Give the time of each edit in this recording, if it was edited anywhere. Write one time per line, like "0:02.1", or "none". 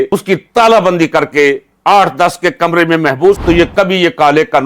0:03.4

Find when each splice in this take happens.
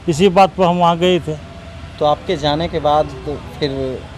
none

